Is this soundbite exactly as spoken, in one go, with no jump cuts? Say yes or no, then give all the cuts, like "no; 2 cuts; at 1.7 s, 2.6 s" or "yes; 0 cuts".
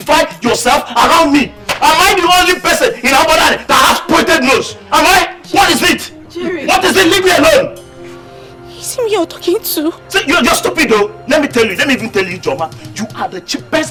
yes; 0 cuts